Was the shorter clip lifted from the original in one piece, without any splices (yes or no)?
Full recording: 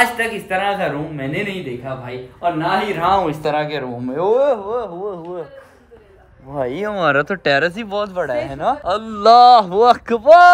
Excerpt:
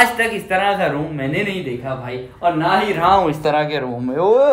yes